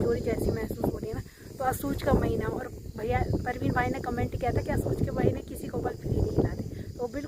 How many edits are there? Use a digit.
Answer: 0